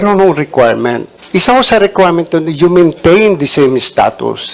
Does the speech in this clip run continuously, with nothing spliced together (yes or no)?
no